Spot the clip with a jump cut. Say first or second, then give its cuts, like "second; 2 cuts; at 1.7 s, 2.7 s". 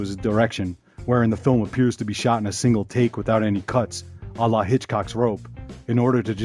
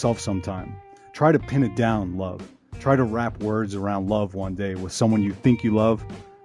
second; 1 cut; at 3.0 s